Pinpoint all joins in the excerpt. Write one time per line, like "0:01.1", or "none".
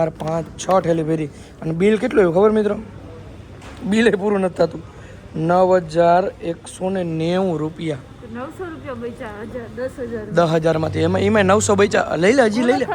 0:10.9